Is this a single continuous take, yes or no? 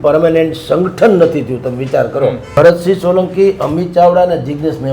no